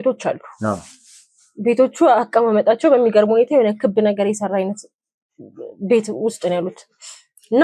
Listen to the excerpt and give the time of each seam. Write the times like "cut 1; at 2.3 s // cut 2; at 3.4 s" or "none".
none

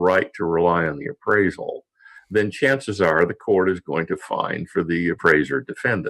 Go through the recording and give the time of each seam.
cut 1; at 5.2 s

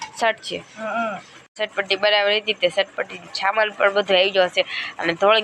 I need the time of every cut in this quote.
cut 1; at 1.5 s

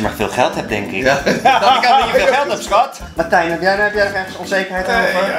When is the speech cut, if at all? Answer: cut 1; at 3.0 s

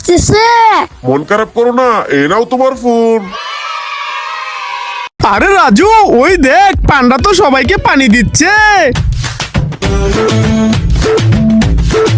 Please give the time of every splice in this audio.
cut 1; at 5.2 s

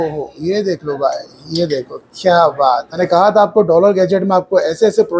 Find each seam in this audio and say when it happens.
cut 1; at 2.9 s

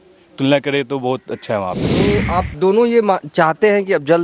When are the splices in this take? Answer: cut 1; at 2.1 s

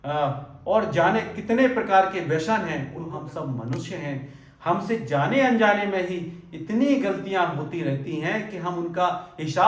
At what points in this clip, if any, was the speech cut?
cut 1; at 3.2 s

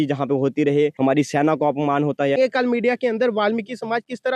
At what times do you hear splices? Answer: cut 1; at 0.9 s // cut 2; at 2.4 s

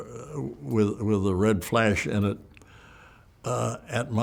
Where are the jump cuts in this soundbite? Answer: none

